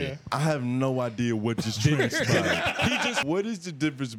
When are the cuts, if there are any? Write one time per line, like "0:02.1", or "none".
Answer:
0:03.2